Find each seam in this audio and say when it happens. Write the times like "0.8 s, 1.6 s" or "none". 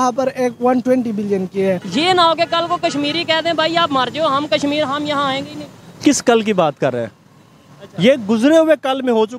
1.9 s